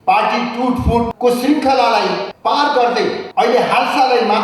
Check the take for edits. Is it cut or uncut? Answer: cut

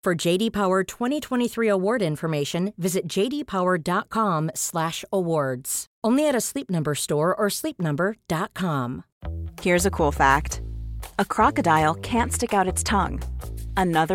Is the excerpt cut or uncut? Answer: cut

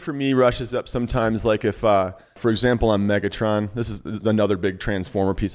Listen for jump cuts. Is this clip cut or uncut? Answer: cut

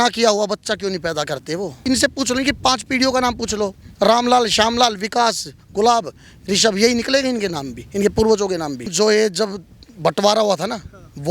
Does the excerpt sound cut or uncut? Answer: cut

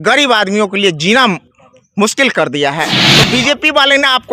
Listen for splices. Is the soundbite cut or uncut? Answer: cut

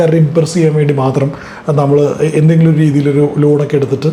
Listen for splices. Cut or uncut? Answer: uncut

